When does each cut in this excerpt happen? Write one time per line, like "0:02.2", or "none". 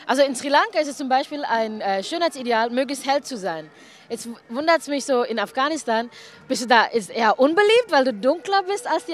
0:03.8